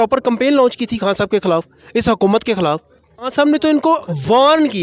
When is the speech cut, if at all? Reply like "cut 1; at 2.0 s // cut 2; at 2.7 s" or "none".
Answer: cut 1; at 3.3 s